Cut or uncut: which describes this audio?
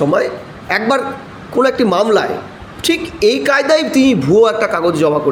uncut